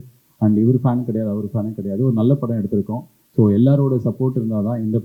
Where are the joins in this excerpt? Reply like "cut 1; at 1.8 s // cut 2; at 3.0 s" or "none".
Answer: none